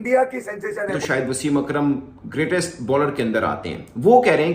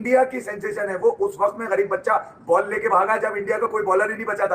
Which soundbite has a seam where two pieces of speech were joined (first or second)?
first